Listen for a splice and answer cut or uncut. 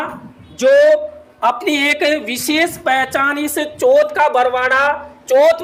uncut